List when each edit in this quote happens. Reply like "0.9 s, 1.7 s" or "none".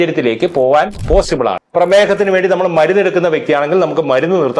1.6 s

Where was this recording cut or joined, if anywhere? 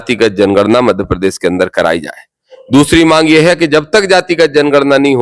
none

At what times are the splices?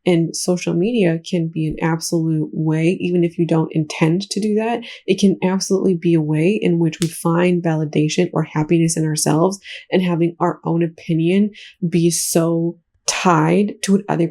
none

